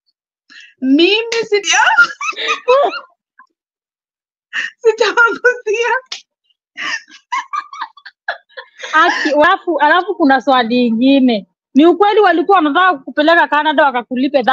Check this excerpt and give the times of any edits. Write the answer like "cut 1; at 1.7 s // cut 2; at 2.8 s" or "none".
cut 1; at 1.6 s // cut 2; at 9.4 s